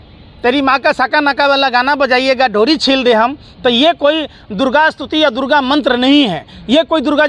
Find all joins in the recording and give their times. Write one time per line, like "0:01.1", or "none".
none